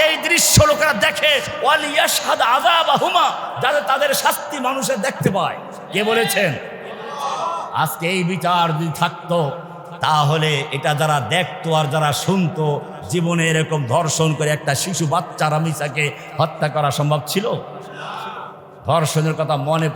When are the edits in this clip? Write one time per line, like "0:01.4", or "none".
none